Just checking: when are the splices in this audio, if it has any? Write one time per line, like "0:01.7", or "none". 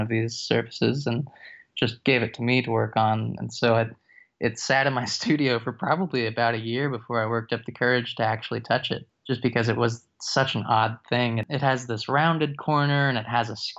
0:09.1
0:11.4